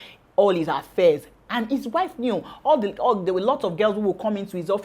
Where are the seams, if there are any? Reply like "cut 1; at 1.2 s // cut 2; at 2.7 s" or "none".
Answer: none

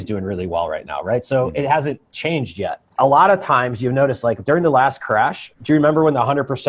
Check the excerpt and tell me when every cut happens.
cut 1; at 2.8 s // cut 2; at 5.5 s

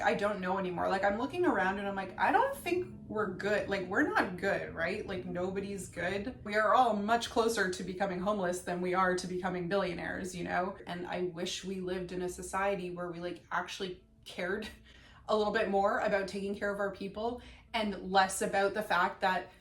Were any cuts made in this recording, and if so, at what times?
cut 1; at 6.4 s // cut 2; at 10.9 s

